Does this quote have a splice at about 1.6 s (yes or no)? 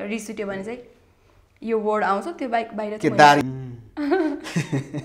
no